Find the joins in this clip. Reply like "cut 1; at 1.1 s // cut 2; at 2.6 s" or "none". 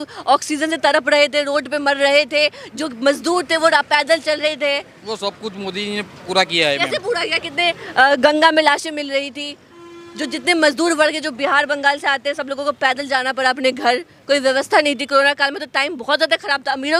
none